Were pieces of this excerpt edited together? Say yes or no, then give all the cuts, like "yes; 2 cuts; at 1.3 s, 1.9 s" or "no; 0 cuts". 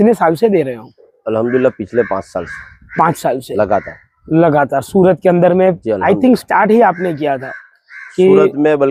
no; 0 cuts